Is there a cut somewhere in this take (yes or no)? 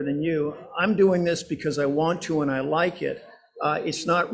no